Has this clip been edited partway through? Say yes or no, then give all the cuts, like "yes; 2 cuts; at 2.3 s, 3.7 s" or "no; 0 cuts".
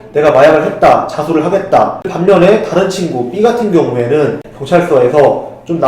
yes; 2 cuts; at 2.1 s, 4.5 s